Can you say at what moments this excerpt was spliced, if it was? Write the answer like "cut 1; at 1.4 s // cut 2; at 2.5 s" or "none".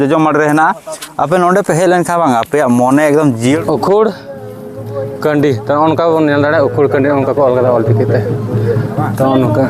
cut 1; at 3.6 s